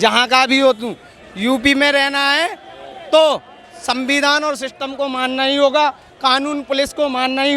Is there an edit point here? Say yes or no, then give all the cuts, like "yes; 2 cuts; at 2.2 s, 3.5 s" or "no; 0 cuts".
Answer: no; 0 cuts